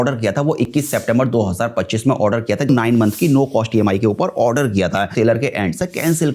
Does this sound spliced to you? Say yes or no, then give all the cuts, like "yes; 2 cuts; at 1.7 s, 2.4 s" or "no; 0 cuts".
yes; 2 cuts; at 2.7 s, 5.1 s